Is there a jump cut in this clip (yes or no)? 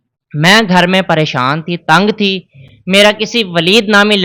no